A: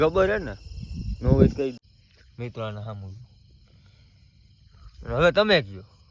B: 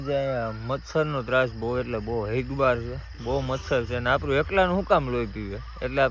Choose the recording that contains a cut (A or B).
A